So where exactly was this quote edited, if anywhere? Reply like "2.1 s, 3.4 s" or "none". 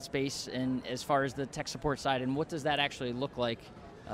none